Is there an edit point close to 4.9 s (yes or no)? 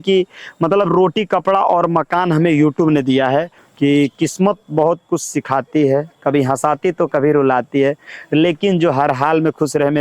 no